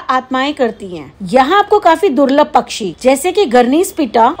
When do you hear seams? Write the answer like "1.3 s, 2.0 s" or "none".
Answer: none